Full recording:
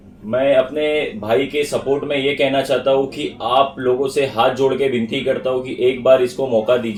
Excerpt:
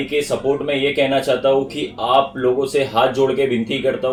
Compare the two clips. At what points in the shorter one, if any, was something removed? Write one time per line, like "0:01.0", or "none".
none